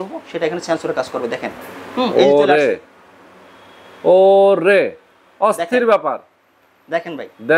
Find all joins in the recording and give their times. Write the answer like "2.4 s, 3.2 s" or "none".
none